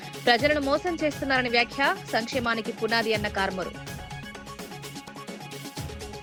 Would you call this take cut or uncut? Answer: uncut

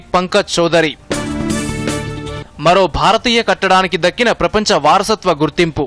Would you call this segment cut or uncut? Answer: uncut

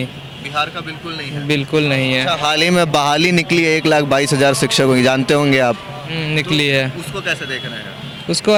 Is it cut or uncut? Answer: uncut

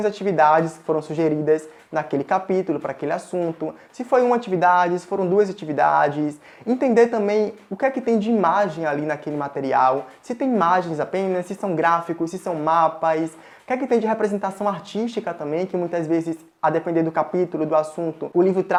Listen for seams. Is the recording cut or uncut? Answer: uncut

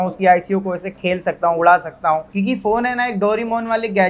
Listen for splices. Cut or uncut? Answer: cut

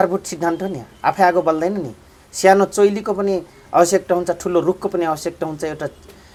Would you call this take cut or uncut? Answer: uncut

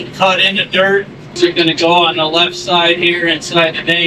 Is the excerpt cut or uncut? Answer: cut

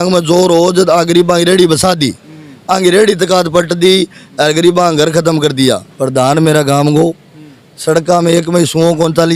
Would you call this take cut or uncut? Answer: cut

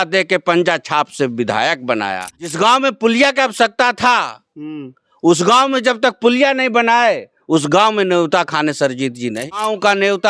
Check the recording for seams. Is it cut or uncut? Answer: cut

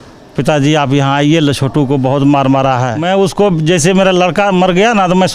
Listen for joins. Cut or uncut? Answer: cut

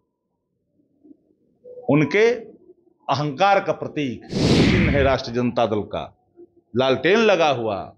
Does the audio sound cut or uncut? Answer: cut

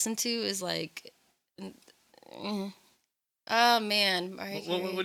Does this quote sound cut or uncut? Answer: uncut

